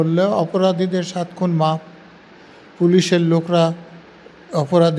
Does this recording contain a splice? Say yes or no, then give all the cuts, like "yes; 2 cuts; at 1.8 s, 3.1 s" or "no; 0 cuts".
no; 0 cuts